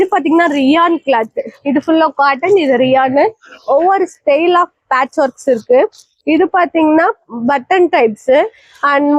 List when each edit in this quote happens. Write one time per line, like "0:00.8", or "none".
none